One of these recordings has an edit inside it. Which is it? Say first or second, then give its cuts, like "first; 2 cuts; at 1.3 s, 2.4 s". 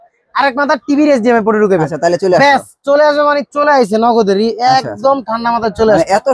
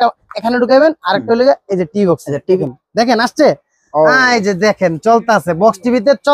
second; 1 cut; at 2.6 s